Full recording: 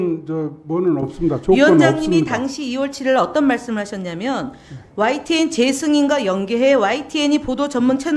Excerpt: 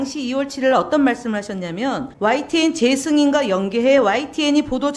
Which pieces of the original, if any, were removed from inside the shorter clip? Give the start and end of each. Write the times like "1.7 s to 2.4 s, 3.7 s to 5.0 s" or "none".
4.5 s to 4.8 s